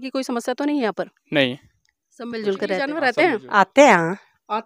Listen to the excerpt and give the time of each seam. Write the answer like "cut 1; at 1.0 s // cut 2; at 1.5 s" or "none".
cut 1; at 3.0 s

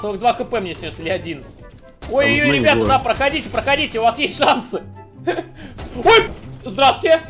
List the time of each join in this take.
cut 1; at 6.3 s

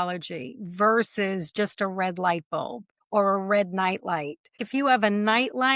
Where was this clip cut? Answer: cut 1; at 4.6 s

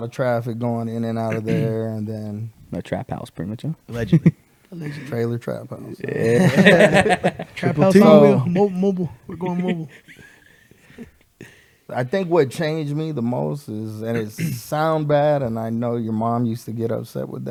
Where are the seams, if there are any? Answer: none

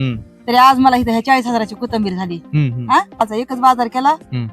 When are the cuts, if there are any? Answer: cut 1; at 3.2 s

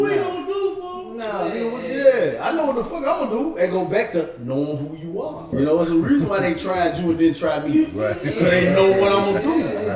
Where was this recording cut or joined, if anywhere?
cut 1; at 5.4 s

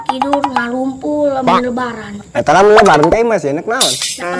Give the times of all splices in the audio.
cut 1; at 2.3 s

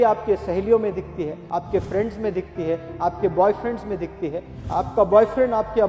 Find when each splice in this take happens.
cut 1; at 1.4 s

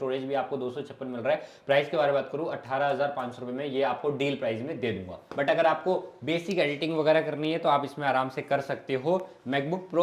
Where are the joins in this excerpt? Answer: cut 1; at 5.2 s

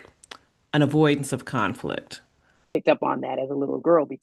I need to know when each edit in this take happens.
cut 1; at 2.8 s

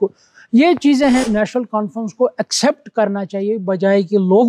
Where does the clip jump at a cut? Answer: cut 1; at 1.3 s

